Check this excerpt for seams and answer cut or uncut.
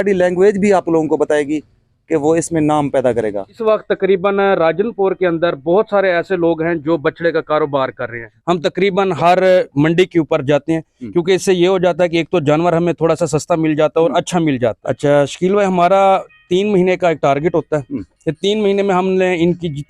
cut